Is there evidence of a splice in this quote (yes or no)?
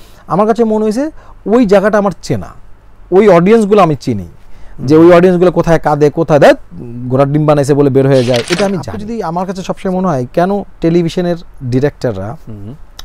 yes